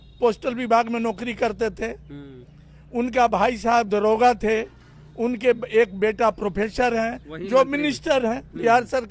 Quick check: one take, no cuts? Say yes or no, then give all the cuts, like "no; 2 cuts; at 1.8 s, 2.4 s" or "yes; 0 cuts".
yes; 0 cuts